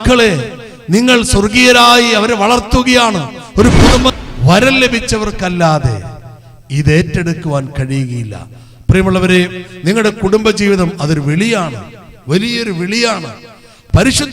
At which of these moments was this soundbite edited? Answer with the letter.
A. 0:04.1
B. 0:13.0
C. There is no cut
A